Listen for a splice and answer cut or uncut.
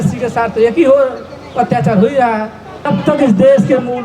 cut